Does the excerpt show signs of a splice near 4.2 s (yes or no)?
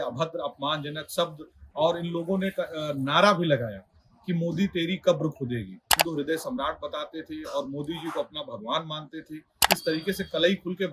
no